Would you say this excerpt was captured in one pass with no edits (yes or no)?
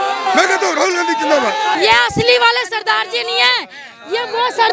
no